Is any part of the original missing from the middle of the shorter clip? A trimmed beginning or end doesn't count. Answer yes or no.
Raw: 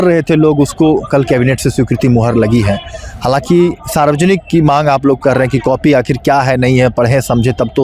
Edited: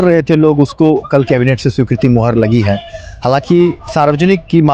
no